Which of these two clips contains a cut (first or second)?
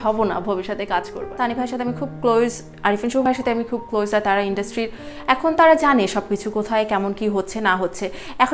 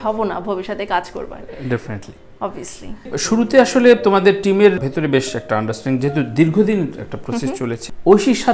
first